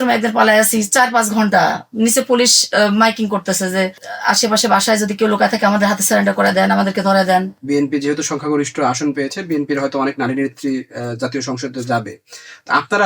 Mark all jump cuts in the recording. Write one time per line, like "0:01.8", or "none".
0:07.5

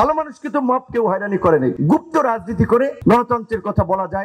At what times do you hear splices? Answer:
0:01.8
0:02.9

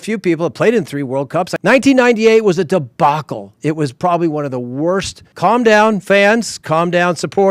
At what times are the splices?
0:01.5
0:05.2

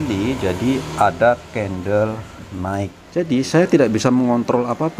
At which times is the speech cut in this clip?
0:03.0

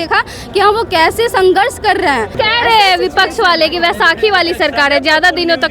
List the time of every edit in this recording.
0:02.3

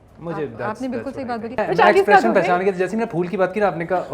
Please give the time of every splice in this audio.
0:01.6

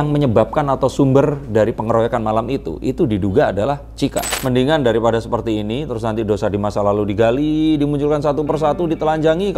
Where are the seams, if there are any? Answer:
0:04.2

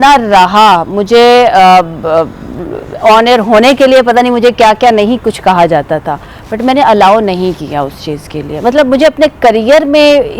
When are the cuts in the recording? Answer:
none

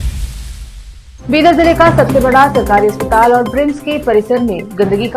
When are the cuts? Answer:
0:01.0

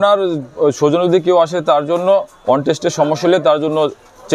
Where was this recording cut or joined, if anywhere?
none

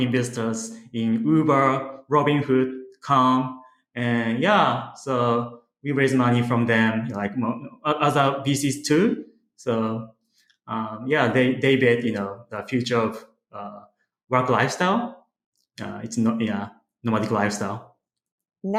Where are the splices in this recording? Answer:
none

